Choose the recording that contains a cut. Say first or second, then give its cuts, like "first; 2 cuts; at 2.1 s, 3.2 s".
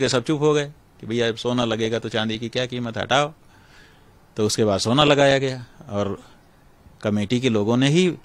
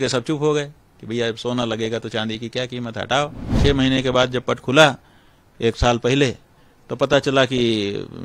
second; 1 cut; at 3.5 s